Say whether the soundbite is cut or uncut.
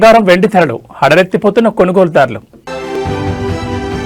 cut